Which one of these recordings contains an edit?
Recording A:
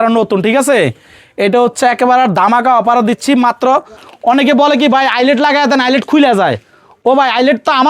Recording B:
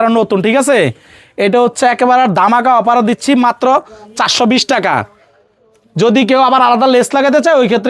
A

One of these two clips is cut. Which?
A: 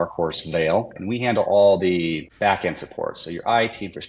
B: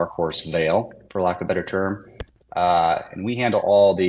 A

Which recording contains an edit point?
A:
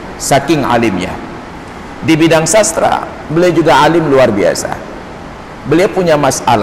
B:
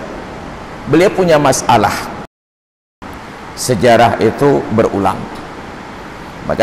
B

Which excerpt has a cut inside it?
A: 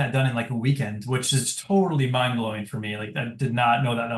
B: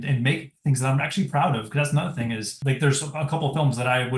B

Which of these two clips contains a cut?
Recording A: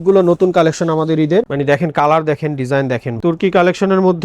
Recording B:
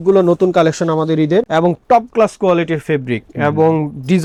A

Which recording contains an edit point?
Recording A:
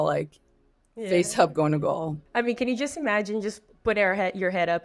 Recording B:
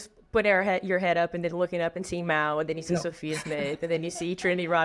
A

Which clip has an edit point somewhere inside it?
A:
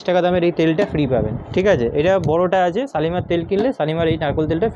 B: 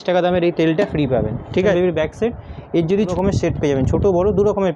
B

